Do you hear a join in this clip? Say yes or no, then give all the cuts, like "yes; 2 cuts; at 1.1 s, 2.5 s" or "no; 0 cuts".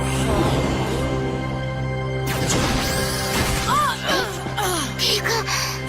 yes; 1 cut; at 5.0 s